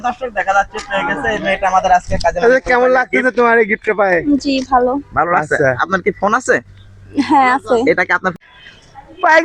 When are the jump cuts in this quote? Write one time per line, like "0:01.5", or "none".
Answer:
0:08.4